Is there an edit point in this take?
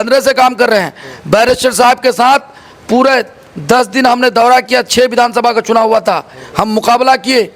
no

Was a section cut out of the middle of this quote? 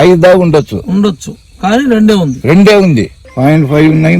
yes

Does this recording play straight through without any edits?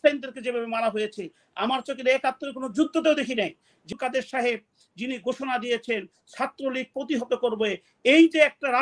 no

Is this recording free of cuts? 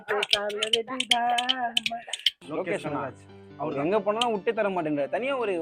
no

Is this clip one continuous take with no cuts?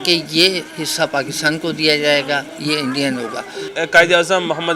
no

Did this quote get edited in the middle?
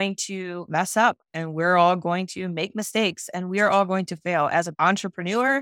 yes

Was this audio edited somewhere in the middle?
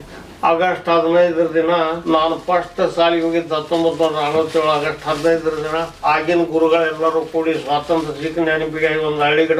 yes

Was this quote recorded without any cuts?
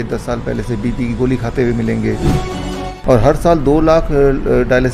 no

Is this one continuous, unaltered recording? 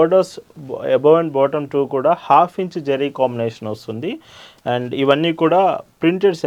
yes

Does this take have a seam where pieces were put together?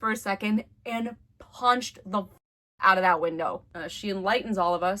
yes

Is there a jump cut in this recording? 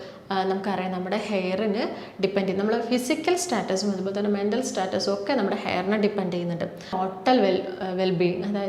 yes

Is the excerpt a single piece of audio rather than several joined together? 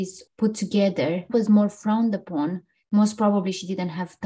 yes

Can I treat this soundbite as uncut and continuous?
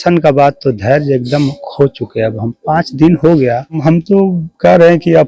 no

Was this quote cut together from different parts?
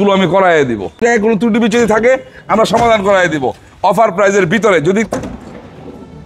yes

